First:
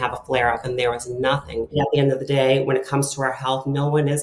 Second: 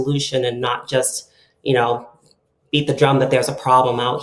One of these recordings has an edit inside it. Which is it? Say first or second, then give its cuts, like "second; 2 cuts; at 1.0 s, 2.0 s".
first; 1 cut; at 1.8 s